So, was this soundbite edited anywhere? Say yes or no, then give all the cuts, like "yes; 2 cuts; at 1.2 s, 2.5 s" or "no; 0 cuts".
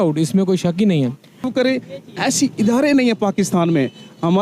yes; 1 cut; at 1.5 s